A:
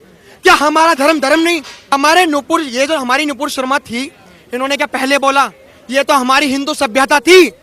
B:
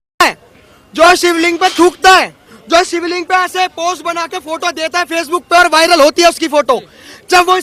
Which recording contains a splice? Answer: A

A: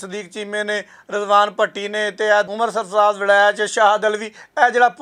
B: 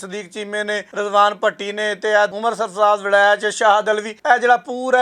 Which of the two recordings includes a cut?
B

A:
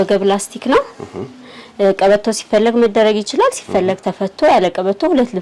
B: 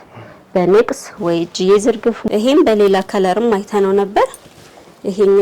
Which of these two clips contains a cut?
B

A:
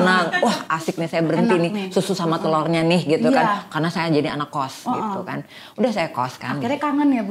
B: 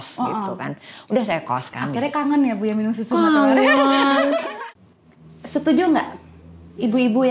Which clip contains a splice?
B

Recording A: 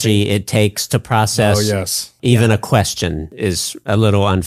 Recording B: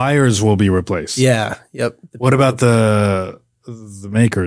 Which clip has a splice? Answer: A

